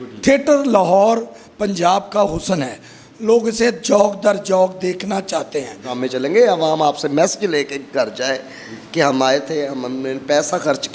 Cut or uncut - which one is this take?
cut